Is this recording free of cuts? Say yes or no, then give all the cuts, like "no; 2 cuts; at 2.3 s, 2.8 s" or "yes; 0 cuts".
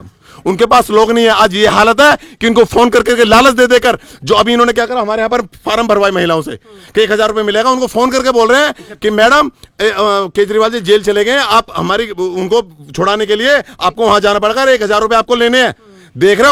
yes; 0 cuts